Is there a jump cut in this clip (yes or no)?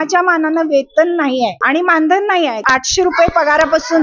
yes